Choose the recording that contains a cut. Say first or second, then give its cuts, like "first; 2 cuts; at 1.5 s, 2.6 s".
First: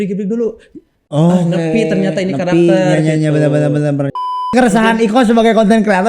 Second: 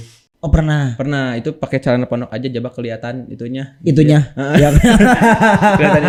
first; 1 cut; at 4.5 s